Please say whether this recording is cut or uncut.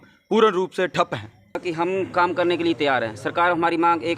cut